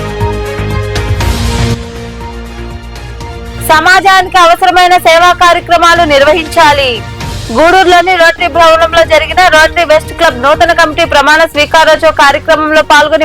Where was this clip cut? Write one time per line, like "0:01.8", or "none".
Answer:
0:01.1